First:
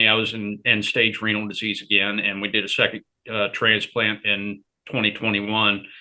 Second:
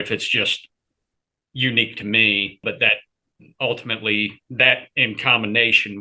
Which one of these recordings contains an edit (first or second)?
second